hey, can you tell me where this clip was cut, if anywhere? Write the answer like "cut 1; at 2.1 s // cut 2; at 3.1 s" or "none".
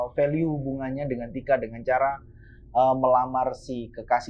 none